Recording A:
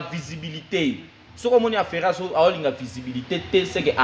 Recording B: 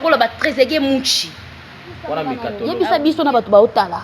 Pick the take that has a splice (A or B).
B